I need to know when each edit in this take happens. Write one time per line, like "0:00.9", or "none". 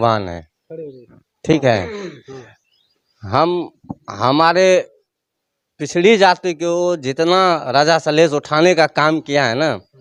none